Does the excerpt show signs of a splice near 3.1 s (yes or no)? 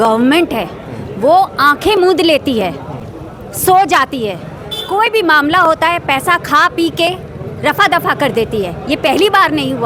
no